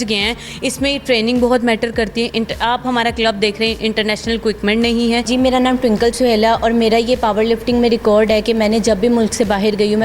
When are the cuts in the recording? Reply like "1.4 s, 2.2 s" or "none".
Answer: 5.3 s